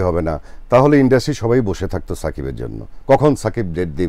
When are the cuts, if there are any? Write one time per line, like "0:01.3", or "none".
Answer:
none

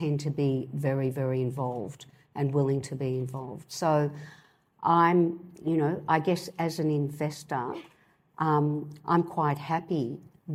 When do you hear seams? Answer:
none

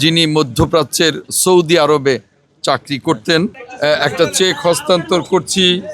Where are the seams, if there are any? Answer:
0:03.6

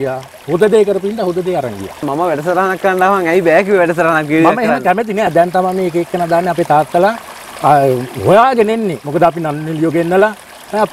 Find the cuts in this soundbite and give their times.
0:02.1
0:05.3
0:09.0

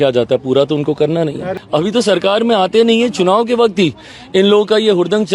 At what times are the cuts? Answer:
0:01.5

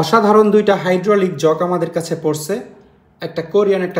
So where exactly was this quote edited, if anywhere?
none

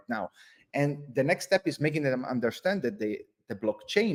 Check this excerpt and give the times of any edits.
none

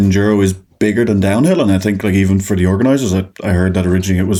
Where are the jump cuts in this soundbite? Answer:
none

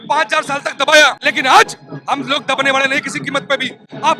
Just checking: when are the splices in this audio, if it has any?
0:01.2

